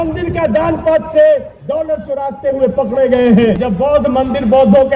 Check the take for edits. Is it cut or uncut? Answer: cut